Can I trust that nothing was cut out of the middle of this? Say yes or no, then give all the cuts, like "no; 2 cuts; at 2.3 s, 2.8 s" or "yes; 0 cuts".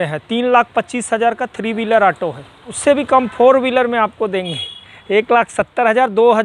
no; 1 cut; at 2.7 s